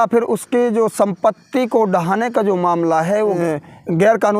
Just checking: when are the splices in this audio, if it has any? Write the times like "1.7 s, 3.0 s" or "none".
3.4 s